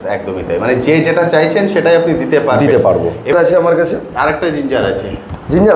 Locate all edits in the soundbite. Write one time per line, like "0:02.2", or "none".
0:03.3